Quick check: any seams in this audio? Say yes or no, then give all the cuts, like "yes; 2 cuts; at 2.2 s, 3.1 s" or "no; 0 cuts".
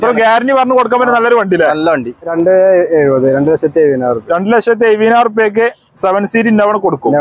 yes; 1 cut; at 2.3 s